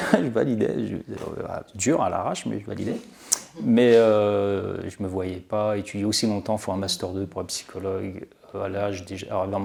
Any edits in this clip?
no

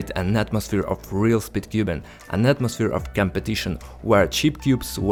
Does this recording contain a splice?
no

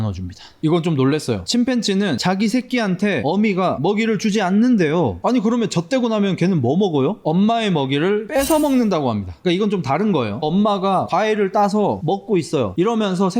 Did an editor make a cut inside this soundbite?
no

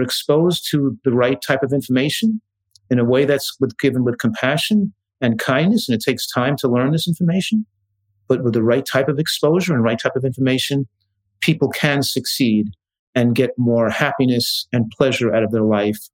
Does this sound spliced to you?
no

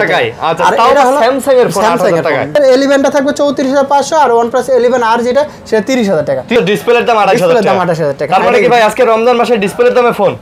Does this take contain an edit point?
yes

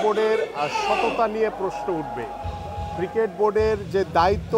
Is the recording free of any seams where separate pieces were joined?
yes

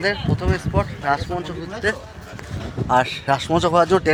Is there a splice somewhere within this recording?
no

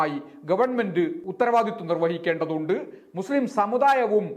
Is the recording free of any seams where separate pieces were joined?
no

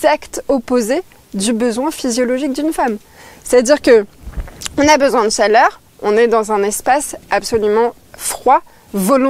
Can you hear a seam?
no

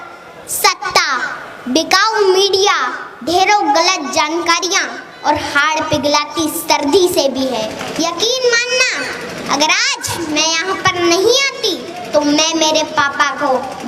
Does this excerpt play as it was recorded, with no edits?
no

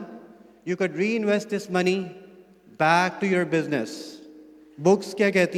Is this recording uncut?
yes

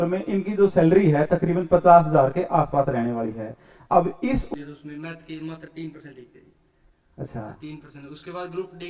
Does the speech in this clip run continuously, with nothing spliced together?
no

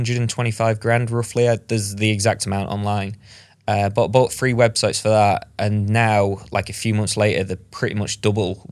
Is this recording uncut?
yes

